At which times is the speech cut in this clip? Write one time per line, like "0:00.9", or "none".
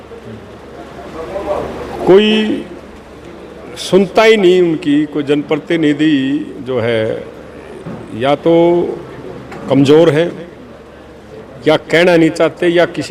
none

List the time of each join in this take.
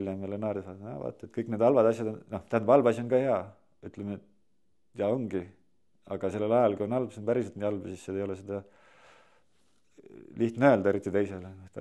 none

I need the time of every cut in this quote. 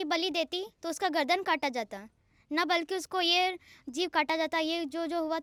none

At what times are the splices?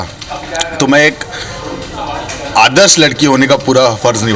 none

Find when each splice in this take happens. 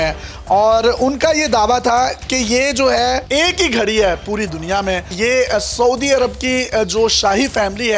0:03.2

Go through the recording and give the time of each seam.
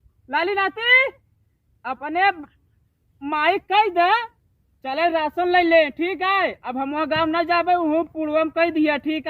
none

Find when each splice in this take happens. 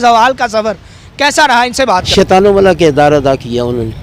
0:02.1

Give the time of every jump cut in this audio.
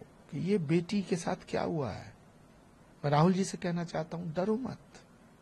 none

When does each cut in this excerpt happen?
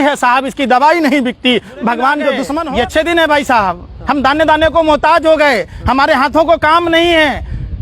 0:02.5

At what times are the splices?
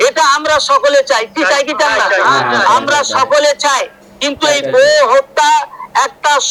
none

